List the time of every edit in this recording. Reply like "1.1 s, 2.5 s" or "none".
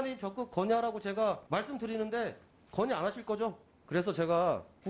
1.4 s, 3.7 s